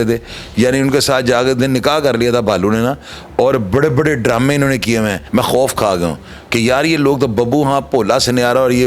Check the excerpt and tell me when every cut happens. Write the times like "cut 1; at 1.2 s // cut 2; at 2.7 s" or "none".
cut 1; at 5.2 s